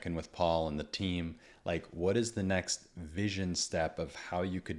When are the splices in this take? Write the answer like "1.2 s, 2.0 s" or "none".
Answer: none